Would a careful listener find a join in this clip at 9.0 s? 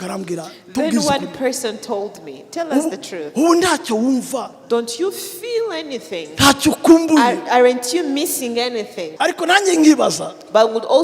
yes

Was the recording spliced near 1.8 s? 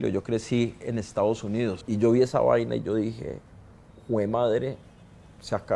yes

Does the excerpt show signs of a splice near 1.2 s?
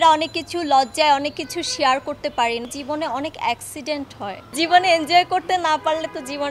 no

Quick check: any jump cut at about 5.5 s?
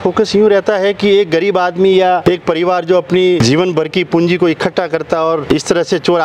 yes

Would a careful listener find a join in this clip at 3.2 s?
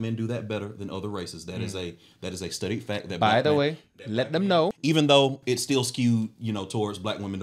no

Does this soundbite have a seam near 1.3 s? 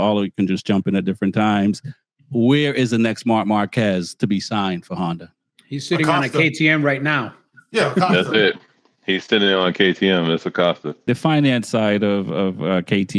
no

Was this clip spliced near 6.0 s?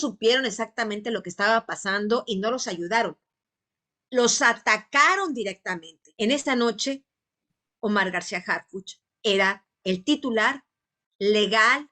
yes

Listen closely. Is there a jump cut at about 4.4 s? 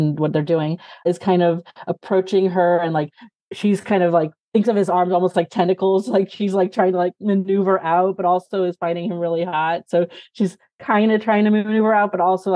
yes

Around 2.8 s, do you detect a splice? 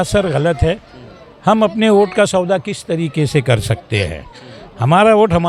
no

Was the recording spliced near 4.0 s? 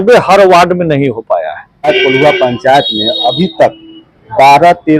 no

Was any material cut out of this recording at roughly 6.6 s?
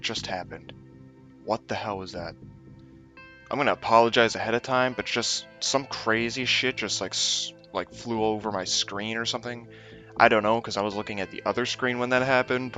no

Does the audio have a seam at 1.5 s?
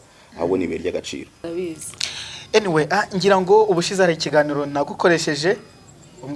yes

